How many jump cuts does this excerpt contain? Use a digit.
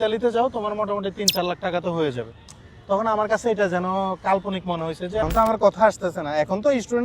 1